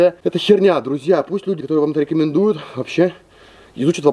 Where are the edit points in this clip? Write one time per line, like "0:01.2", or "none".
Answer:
none

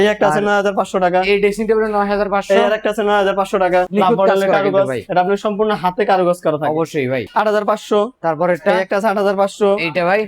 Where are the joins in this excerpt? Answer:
0:03.9
0:07.2

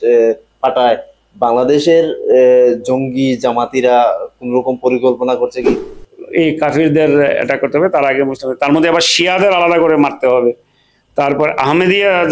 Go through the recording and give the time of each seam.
0:05.8

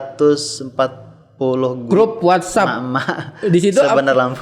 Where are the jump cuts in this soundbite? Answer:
none

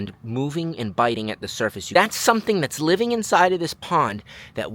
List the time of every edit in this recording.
0:01.8

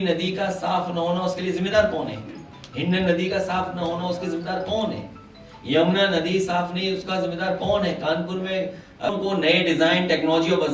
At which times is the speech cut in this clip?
0:09.1

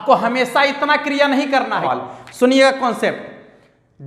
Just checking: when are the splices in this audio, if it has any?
0:01.9

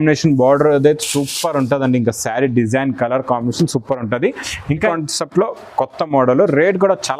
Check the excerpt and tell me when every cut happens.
0:04.9

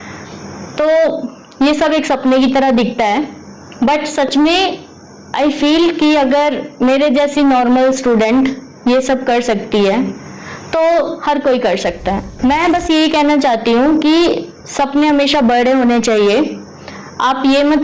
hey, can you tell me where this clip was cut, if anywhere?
0:12.3

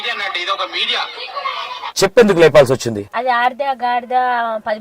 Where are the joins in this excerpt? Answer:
0:01.9
0:03.1

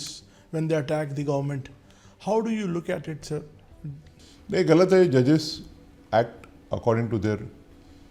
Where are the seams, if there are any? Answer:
none

